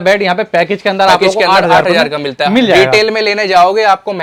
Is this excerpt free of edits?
yes; 0 cuts

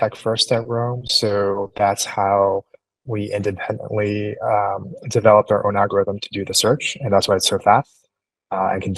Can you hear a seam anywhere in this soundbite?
no; 0 cuts

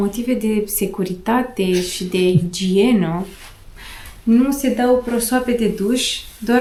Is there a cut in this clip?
no; 0 cuts

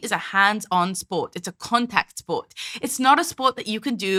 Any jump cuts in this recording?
no; 0 cuts

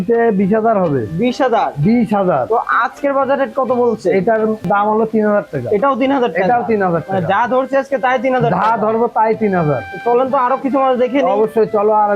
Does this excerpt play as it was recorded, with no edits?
yes; 0 cuts

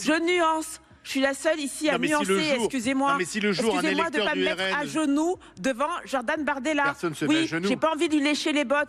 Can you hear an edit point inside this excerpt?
no; 0 cuts

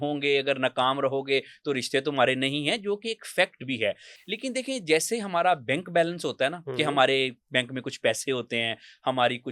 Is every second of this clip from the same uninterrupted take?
yes; 0 cuts

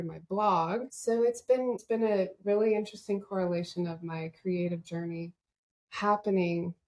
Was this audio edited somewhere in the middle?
yes; 2 cuts; at 0.9 s, 1.8 s

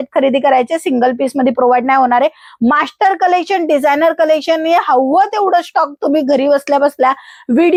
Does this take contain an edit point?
no; 0 cuts

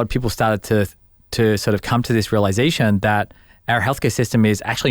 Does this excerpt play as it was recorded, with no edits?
yes; 0 cuts

